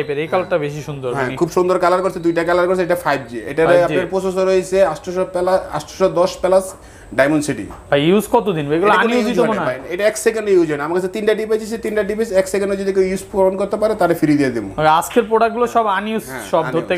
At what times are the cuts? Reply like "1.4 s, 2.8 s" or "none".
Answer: none